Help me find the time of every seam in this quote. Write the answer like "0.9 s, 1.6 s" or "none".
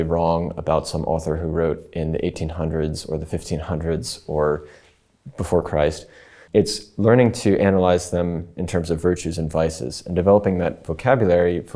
6.3 s